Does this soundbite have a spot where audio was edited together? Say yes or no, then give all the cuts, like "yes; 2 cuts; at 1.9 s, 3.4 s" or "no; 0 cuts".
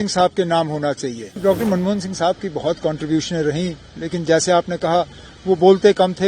yes; 1 cut; at 1.4 s